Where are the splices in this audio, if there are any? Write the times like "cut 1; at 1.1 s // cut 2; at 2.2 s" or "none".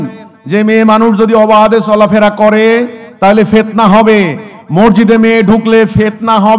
none

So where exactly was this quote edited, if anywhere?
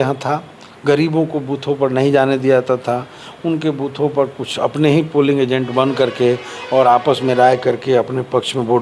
none

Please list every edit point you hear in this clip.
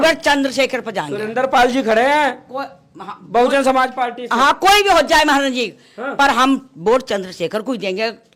none

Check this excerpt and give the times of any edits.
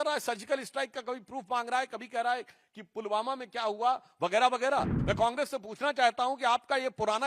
cut 1; at 4.9 s

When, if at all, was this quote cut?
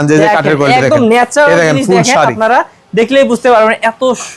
none

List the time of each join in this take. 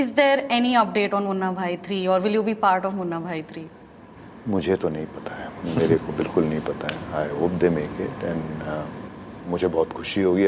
none

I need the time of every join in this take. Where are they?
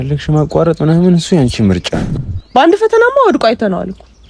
cut 1; at 2.0 s

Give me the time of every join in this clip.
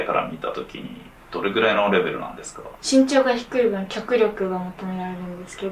cut 1; at 2.7 s

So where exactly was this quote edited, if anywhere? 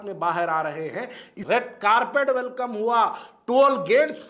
cut 1; at 1.3 s

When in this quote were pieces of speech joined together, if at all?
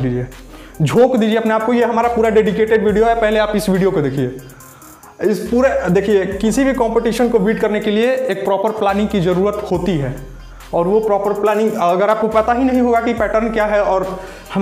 none

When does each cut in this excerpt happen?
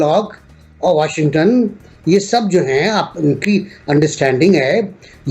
none

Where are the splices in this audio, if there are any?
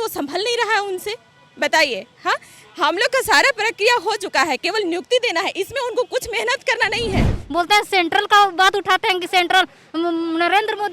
cut 1; at 7.4 s

